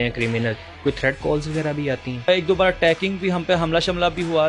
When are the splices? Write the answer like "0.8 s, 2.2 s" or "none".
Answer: 2.3 s